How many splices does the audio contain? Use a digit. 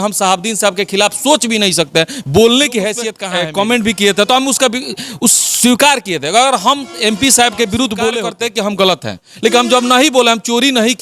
2